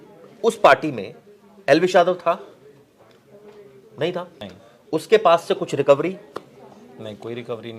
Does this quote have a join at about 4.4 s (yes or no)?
yes